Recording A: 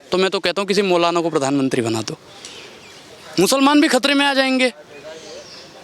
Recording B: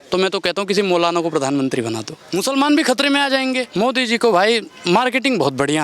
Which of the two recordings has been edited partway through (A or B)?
B